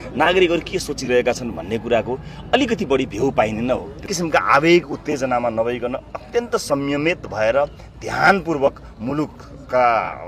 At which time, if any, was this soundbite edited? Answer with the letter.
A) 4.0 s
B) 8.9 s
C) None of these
A